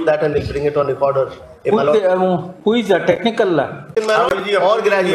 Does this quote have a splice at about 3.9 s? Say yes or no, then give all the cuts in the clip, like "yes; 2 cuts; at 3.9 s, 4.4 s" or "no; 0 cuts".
yes; 1 cut; at 3.9 s